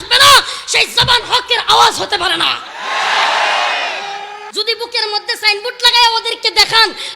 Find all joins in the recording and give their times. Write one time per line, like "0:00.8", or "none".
0:04.4